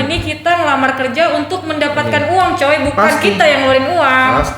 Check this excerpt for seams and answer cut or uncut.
uncut